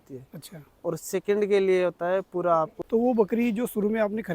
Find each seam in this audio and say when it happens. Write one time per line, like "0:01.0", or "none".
0:02.8